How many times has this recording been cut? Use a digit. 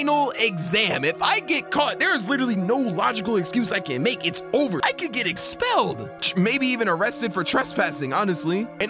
1